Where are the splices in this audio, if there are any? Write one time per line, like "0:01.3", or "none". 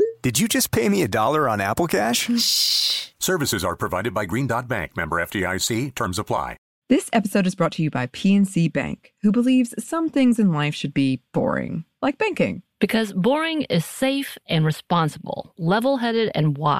0:06.7